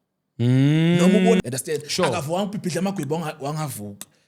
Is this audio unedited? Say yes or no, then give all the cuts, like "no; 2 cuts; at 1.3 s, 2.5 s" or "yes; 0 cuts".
no; 1 cut; at 1.4 s